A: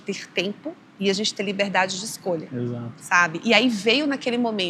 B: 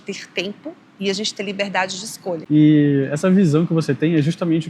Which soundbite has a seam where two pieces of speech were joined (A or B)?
B